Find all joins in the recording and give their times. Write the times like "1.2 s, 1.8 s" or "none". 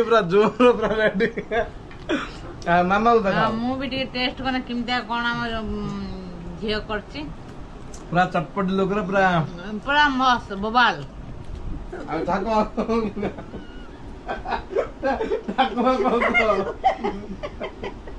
none